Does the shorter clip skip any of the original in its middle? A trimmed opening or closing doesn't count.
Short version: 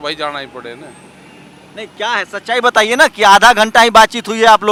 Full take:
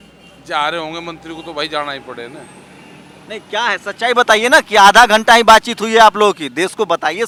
no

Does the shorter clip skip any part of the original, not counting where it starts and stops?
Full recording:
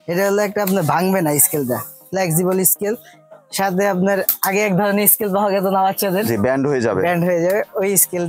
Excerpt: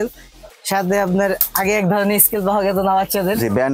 no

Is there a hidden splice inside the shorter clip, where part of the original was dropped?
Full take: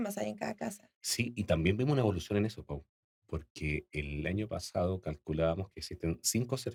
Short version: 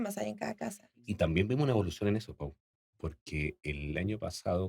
yes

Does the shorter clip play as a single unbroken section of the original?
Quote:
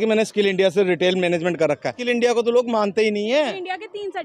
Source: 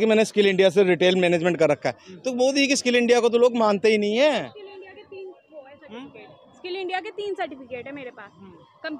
no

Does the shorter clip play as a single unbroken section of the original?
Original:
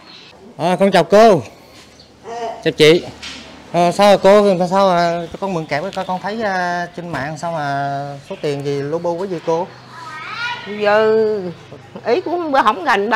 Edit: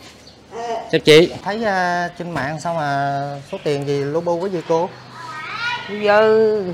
no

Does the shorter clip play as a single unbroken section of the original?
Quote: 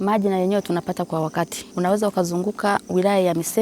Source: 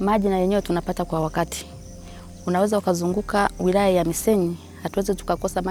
no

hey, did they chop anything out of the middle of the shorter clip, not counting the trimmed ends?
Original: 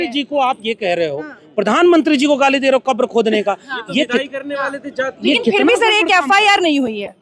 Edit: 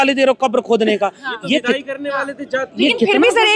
no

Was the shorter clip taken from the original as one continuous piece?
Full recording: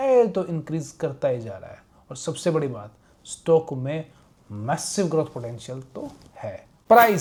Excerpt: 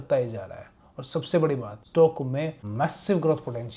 no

